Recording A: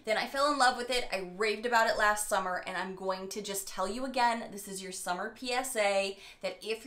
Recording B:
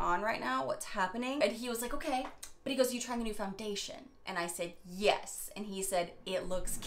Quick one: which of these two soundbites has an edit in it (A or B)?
B